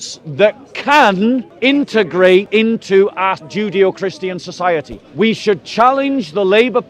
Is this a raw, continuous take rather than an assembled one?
no; 4 cuts; at 1.5 s, 2.5 s, 3.4 s, 5.0 s

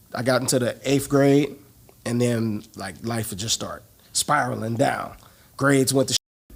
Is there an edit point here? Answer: no; 0 cuts

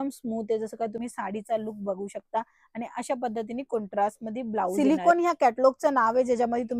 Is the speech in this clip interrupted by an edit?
yes; 2 cuts; at 1.0 s, 4.7 s

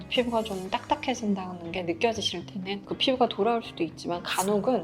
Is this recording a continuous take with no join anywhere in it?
no; 1 cut; at 2.8 s

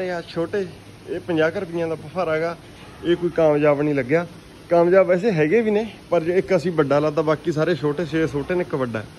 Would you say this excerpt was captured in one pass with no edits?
yes; 0 cuts

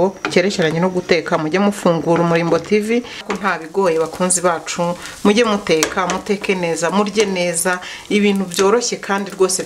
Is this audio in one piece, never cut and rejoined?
no; 1 cut; at 3.2 s

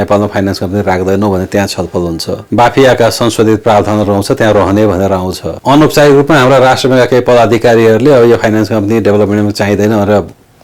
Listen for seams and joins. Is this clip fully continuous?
yes; 0 cuts

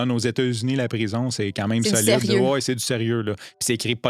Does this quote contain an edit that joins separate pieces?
no; 0 cuts

